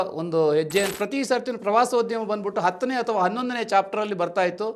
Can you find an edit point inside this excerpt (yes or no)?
yes